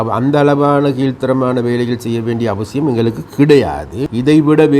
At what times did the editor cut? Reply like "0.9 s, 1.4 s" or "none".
3.9 s